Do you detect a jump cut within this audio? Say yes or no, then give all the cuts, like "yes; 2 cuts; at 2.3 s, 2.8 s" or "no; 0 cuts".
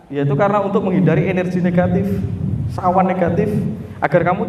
no; 0 cuts